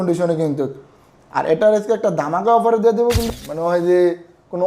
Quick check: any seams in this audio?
yes; 1 cut; at 3.3 s

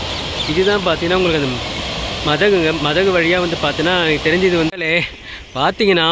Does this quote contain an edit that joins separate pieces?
yes; 1 cut; at 4.7 s

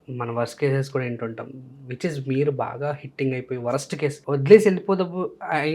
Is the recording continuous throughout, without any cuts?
no; 1 cut; at 4.2 s

